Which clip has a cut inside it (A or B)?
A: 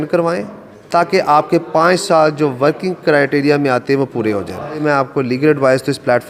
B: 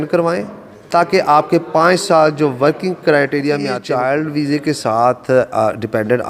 B